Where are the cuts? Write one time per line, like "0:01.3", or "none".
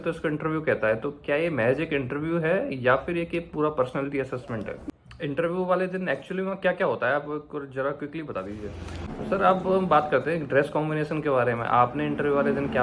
0:04.8
0:09.1